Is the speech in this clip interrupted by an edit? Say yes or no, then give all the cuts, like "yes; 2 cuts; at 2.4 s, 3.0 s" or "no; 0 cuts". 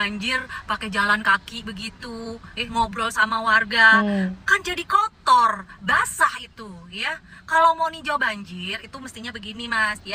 no; 0 cuts